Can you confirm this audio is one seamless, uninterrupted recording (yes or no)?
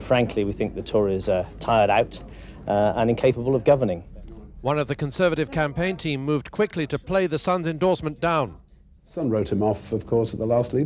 yes